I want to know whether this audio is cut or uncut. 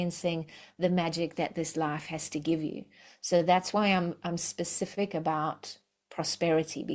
uncut